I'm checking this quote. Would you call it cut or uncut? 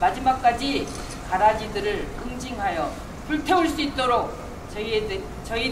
cut